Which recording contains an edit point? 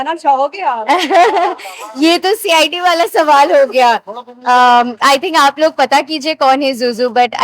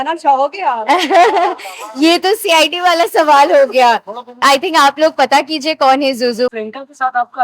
second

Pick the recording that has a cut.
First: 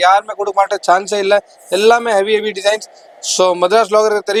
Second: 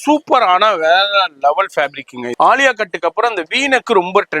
second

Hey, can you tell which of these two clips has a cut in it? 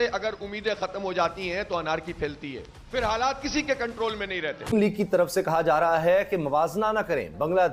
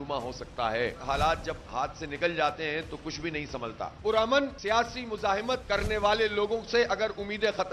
first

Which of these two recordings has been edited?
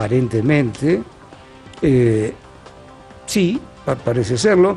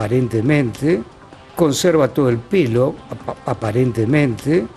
first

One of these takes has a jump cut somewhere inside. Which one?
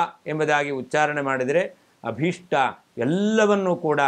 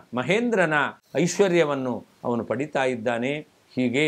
second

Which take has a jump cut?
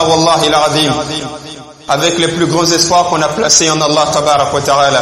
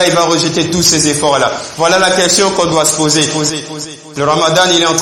second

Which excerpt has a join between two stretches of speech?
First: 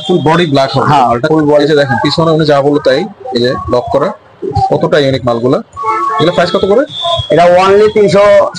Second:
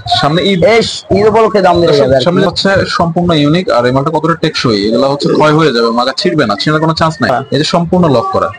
second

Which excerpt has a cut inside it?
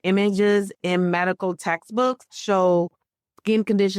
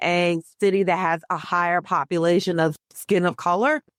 first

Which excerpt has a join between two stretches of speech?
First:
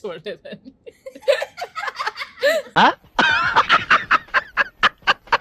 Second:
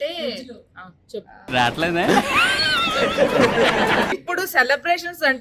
second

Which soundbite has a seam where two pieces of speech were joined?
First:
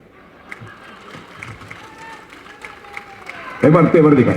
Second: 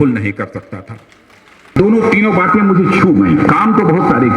second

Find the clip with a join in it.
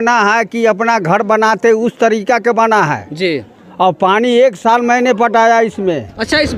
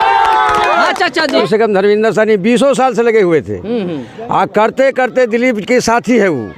second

